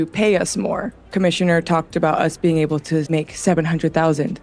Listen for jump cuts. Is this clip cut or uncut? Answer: cut